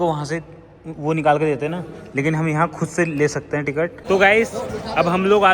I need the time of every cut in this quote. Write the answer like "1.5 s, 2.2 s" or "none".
4.0 s

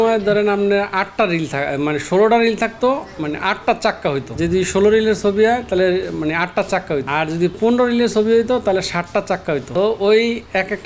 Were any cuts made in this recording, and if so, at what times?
4.3 s, 7.1 s, 9.7 s

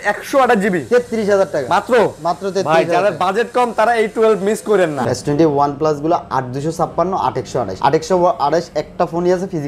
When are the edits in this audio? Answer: 5.0 s, 7.7 s

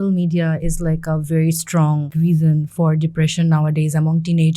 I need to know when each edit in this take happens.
2.1 s

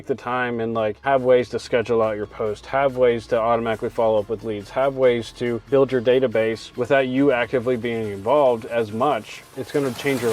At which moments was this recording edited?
1.0 s, 5.7 s

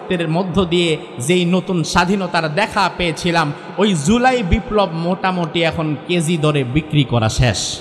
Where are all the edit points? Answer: none

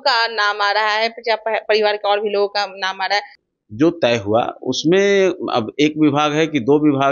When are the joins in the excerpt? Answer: 3.4 s

